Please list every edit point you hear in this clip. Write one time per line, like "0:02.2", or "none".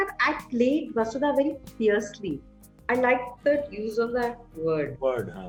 none